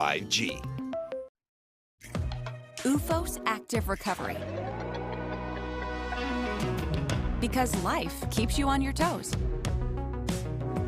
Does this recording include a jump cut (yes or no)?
yes